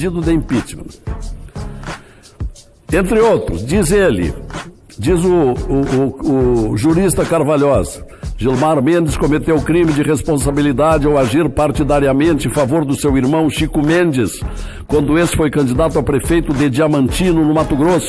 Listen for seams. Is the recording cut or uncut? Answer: uncut